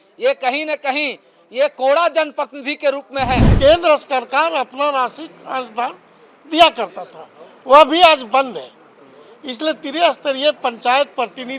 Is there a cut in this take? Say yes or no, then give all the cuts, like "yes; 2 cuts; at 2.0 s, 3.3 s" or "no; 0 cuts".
yes; 1 cut; at 3.5 s